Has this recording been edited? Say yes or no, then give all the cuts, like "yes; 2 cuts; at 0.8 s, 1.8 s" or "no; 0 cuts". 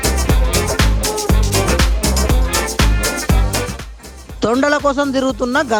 no; 0 cuts